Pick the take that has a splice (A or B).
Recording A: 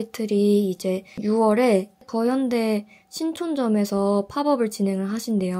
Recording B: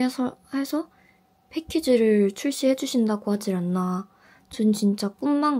A